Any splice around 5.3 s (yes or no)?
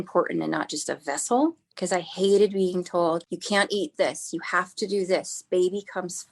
no